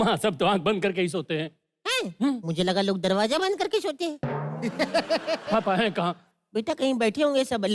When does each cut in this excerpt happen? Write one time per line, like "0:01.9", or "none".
0:05.5